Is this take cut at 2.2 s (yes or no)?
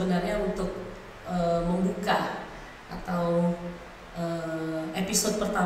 no